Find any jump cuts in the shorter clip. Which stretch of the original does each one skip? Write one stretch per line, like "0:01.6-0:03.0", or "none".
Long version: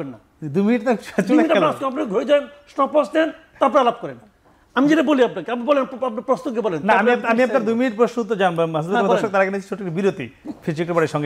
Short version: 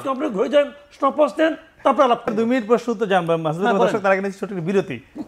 0:04.1-0:07.6